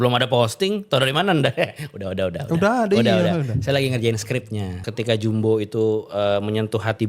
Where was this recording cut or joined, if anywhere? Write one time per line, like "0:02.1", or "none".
0:04.9